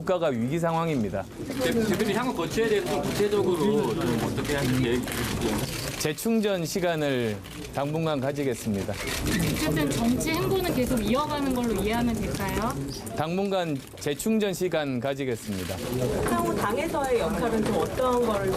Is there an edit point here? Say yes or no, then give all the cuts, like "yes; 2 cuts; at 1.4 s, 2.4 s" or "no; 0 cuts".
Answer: yes; 1 cut; at 10.6 s